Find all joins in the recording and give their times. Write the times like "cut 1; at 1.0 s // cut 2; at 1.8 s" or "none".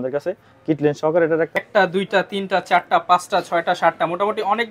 cut 1; at 1.6 s